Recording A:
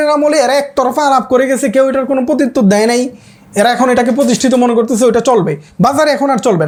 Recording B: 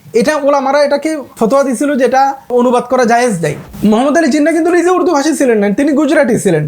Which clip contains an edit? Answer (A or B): B